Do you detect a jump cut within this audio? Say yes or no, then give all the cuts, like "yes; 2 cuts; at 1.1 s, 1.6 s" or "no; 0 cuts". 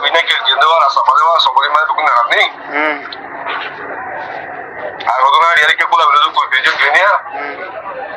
no; 0 cuts